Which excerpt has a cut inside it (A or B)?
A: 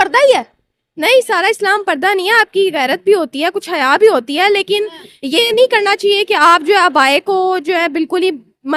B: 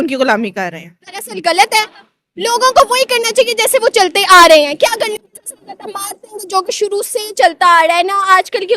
B